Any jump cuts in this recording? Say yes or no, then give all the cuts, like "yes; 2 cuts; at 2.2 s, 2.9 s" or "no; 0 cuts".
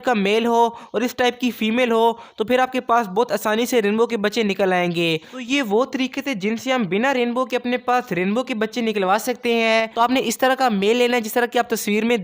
yes; 2 cuts; at 5.3 s, 9.9 s